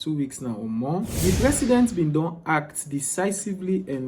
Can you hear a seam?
yes; 1 cut; at 1.1 s

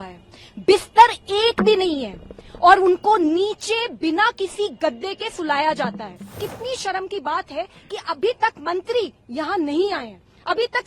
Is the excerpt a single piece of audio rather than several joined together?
no; 1 cut; at 6.4 s

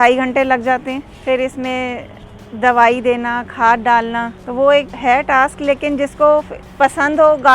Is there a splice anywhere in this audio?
yes; 3 cuts; at 4.4 s, 4.9 s, 6.6 s

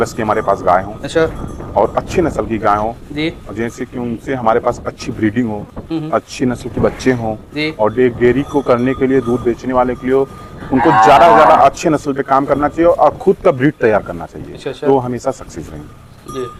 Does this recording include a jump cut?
no; 0 cuts

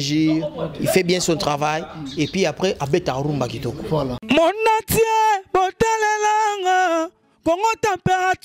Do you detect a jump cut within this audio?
yes; 1 cut; at 4.2 s

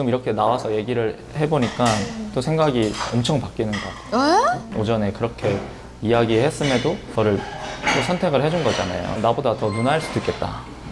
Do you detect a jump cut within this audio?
yes; 3 cuts; at 4.7 s, 7.0 s, 9.1 s

